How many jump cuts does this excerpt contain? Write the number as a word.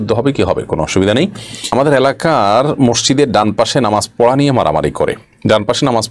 one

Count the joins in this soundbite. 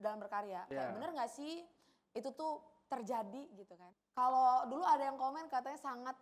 one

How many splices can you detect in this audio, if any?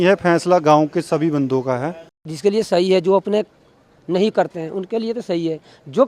one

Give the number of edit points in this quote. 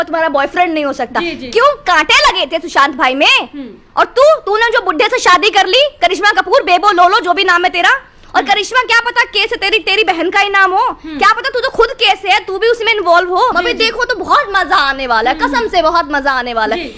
one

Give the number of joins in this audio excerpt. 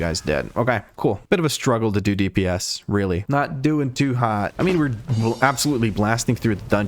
one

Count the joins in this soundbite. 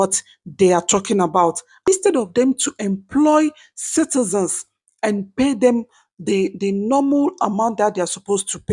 one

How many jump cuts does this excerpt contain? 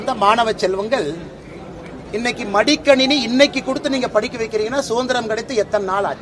zero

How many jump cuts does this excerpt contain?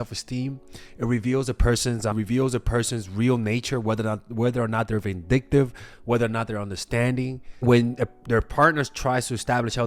two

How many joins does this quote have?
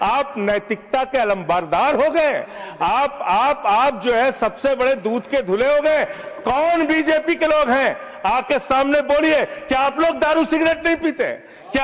zero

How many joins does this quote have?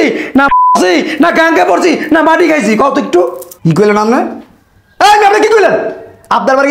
one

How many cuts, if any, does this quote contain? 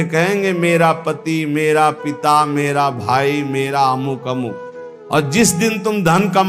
one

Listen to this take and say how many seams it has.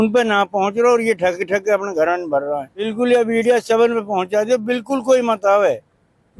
one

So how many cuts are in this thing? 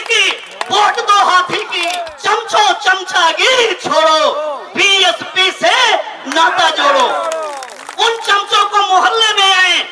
one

